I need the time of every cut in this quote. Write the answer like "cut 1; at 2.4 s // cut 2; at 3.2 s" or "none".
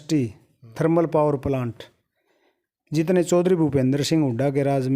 none